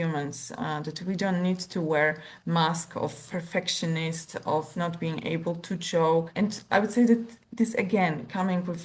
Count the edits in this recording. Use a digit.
1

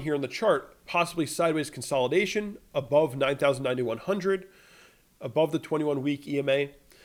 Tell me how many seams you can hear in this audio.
0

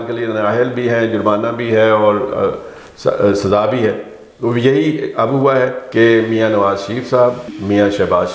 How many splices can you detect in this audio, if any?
1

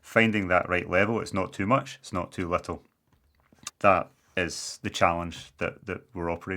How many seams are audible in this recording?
1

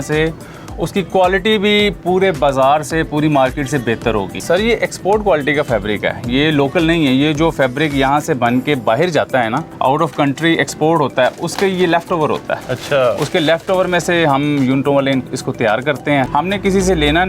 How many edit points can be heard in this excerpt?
3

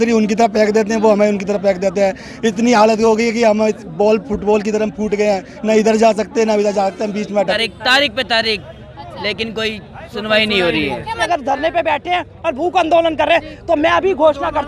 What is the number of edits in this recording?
2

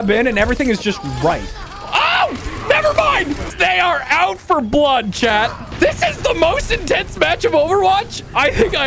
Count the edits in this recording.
2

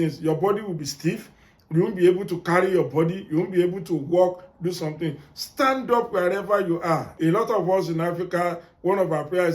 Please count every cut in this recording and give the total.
1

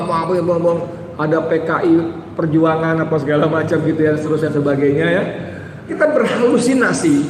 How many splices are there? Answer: 1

